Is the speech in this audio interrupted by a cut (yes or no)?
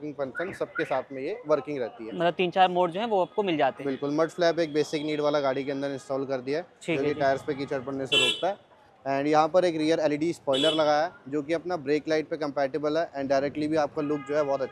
no